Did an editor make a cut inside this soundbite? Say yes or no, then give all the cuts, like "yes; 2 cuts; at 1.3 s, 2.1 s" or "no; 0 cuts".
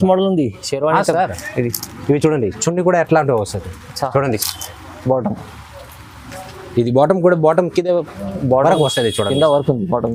no; 0 cuts